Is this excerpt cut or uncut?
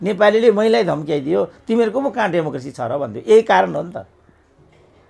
uncut